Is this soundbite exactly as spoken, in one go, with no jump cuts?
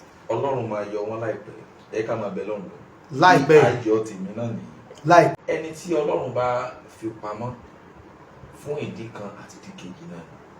no; 1 cut; at 5.3 s

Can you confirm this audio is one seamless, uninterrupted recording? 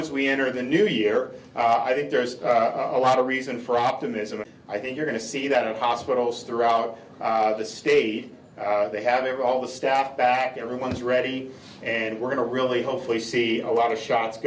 no; 1 cut; at 4.4 s

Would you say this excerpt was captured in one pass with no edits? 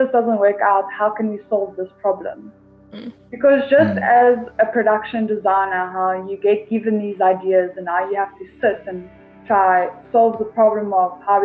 yes; 0 cuts

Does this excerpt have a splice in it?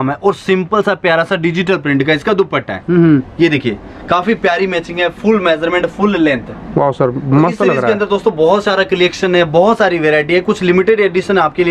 no; 0 cuts

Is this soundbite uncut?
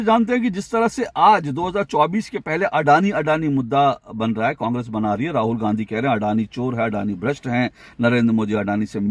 yes; 0 cuts

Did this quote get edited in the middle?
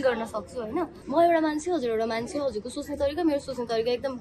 yes; 1 cut; at 1.0 s

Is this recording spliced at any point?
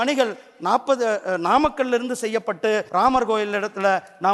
yes; 1 cut; at 2.9 s

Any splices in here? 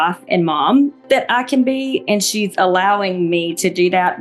no; 0 cuts

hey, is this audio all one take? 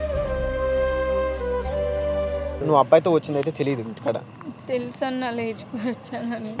no; 1 cut; at 2.6 s

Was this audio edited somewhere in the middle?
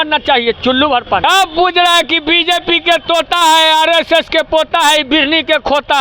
yes; 1 cut; at 1.2 s

